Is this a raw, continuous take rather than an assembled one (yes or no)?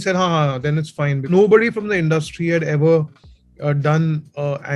no